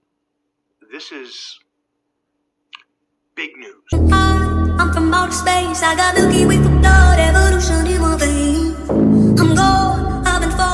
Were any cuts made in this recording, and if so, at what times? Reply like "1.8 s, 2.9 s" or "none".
3.8 s